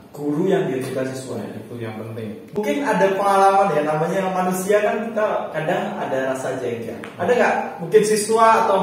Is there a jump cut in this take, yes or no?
yes